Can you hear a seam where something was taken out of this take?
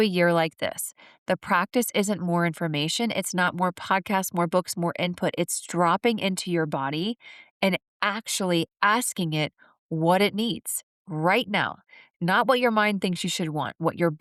no; 0 cuts

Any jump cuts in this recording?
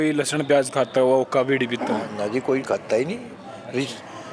no; 0 cuts

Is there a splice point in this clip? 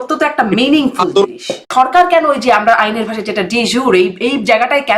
yes; 1 cut; at 1.7 s

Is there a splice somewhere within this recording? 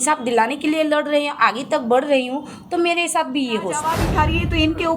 yes; 1 cut; at 4.0 s

